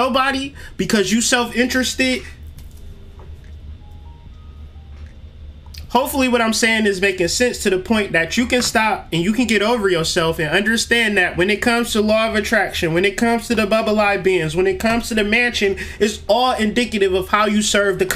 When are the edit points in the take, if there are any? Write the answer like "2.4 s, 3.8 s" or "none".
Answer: none